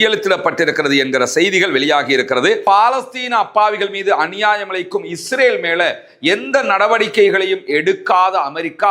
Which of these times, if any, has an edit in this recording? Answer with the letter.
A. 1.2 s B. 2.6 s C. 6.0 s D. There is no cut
B